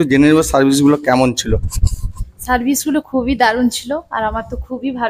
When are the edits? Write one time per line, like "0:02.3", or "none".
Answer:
none